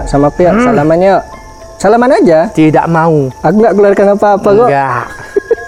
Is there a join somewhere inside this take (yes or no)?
no